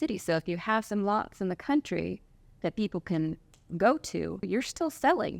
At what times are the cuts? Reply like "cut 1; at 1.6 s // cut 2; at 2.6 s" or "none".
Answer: cut 1; at 4.4 s